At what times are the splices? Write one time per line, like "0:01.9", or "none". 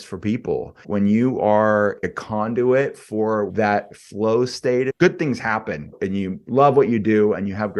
0:00.9
0:02.1
0:03.5
0:04.9
0:05.9